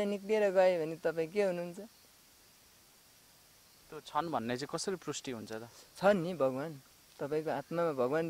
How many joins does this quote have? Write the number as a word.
zero